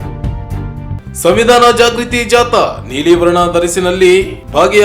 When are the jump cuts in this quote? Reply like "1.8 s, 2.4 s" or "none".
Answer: 1.1 s